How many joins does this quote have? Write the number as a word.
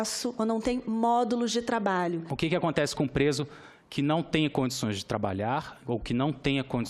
one